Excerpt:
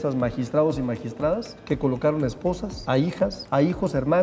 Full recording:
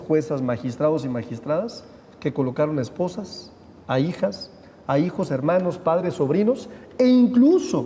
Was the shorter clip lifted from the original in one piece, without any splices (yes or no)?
no